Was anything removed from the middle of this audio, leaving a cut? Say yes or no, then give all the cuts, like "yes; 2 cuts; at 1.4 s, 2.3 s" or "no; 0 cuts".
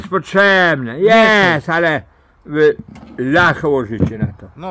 no; 0 cuts